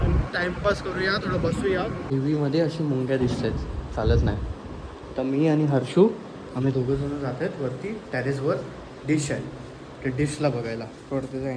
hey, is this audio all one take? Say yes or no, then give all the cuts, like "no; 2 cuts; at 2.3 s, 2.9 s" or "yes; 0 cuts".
no; 1 cut; at 2.1 s